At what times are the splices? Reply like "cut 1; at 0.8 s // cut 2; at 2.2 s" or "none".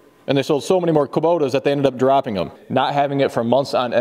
cut 1; at 2.6 s